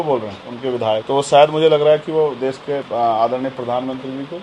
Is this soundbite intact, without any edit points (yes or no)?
no